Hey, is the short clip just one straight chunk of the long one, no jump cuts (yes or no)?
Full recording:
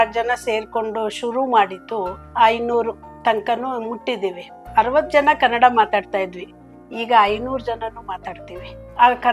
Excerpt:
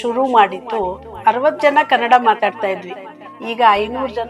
no